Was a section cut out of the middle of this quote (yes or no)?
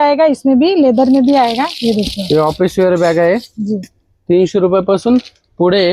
no